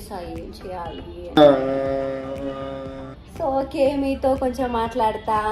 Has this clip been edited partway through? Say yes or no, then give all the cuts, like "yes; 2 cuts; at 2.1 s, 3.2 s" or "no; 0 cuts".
yes; 1 cut; at 1.3 s